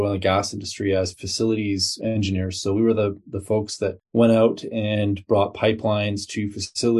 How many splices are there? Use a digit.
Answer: 1